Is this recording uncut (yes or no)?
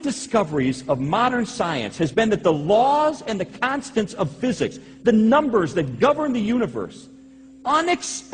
no